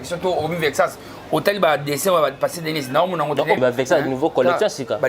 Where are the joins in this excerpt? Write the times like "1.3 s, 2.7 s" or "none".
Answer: 3.6 s